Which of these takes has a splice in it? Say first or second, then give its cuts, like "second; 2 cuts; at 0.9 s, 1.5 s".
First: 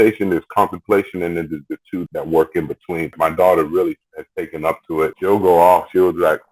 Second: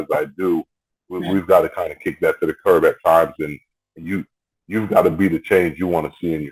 first; 3 cuts; at 2.0 s, 3.1 s, 5.2 s